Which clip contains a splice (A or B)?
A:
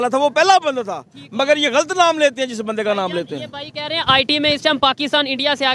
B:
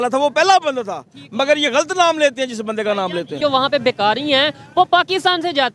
B